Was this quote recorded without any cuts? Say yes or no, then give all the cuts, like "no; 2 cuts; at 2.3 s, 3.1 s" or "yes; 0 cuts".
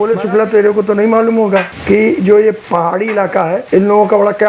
no; 3 cuts; at 1.7 s, 2.6 s, 3.6 s